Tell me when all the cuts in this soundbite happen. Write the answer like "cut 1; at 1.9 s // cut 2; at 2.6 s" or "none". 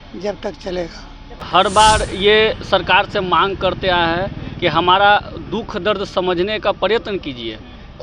cut 1; at 1.4 s